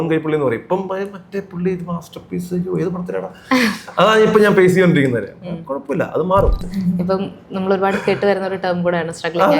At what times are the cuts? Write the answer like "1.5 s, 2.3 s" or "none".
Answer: 6.7 s